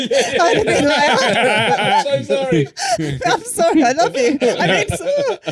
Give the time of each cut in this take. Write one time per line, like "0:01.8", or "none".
none